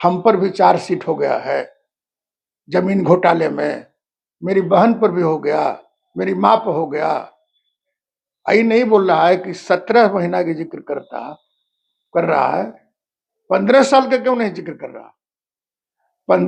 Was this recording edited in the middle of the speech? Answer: no; 0 cuts

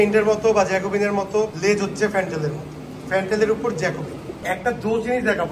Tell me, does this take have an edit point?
yes; 2 cuts; at 1.5 s, 4.4 s

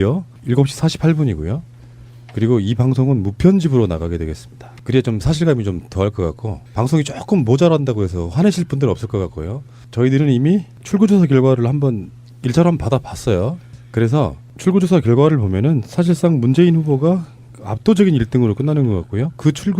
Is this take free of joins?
no; 1 cut; at 1.7 s

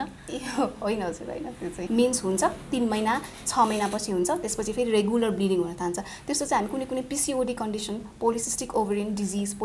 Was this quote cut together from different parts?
yes; 1 cut; at 1.8 s

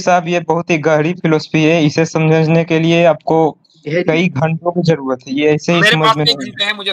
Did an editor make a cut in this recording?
no; 0 cuts

